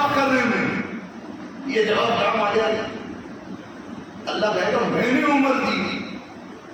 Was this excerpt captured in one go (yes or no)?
yes